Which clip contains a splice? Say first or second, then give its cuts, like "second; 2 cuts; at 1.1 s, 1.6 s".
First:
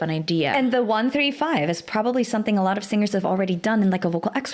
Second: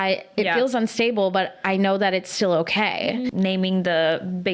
second; 1 cut; at 3.3 s